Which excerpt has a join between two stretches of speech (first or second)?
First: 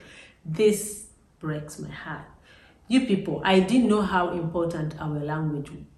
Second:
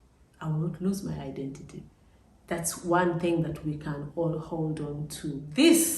second